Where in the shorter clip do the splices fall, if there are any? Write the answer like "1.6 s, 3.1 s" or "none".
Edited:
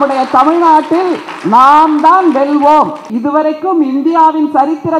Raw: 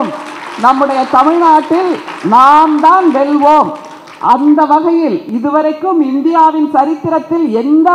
3.1 s